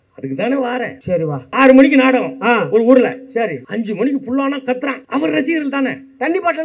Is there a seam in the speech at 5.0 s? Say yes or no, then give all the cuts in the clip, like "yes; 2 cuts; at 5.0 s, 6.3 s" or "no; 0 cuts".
yes; 3 cuts; at 1.5 s, 3.6 s, 5.0 s